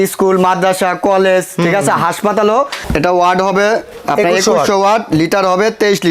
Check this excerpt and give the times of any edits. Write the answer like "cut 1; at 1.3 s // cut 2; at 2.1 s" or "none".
cut 1; at 2.8 s